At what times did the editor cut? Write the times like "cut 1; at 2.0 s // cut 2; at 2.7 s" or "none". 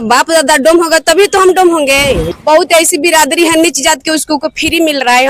cut 1; at 2.3 s